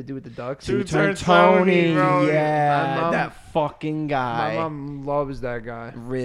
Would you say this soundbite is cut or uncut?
uncut